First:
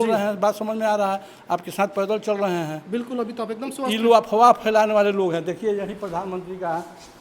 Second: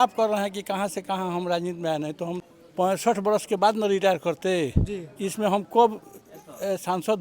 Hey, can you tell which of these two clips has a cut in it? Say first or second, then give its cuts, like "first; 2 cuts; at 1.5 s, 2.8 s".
second; 1 cut; at 2.4 s